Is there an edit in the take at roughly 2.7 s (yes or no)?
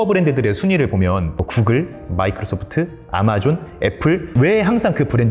no